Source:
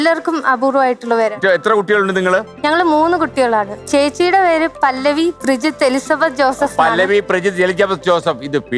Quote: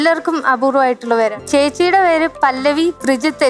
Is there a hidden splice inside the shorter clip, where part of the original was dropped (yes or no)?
yes